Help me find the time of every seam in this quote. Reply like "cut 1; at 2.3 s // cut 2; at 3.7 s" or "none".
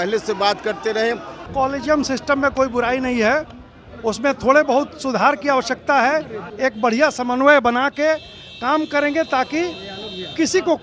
cut 1; at 1.4 s // cut 2; at 6.5 s